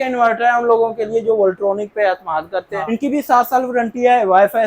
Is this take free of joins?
no; 1 cut; at 2.8 s

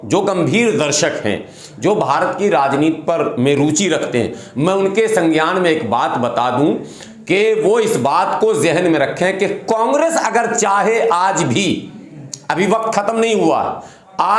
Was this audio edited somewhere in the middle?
no; 0 cuts

